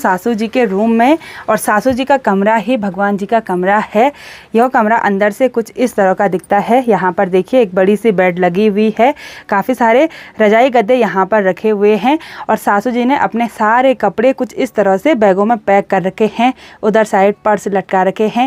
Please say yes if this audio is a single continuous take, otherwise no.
yes